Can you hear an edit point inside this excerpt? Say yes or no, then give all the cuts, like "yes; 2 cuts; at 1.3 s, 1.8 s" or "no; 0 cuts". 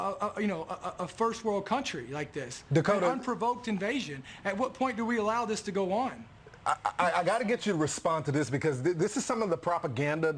no; 0 cuts